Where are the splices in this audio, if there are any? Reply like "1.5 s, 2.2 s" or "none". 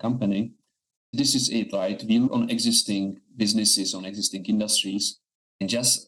1.1 s, 2.3 s